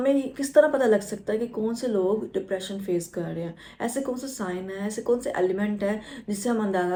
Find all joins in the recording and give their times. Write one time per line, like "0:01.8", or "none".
none